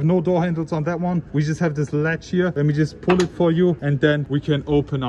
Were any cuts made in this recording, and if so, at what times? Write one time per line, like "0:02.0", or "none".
0:01.3
0:02.5
0:04.0